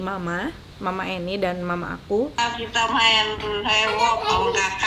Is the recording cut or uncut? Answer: cut